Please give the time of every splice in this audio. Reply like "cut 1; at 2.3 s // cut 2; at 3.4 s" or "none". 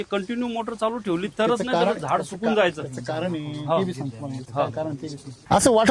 none